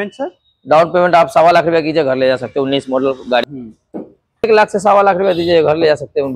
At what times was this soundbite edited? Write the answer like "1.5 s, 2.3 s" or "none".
4.4 s